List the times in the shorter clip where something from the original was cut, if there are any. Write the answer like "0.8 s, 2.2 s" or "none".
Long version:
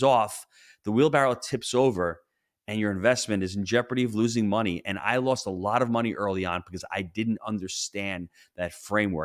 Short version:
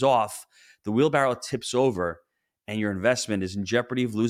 none

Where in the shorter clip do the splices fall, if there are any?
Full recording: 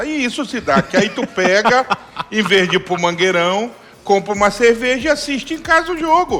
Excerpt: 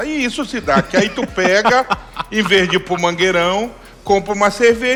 none

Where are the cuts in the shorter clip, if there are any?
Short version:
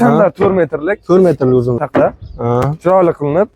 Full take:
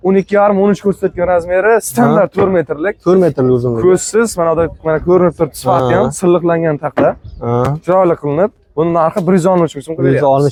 1.8 s

